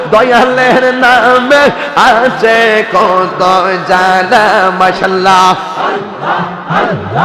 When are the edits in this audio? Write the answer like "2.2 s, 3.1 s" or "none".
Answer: none